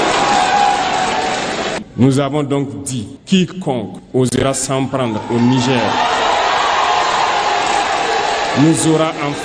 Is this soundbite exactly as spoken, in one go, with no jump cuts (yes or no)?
no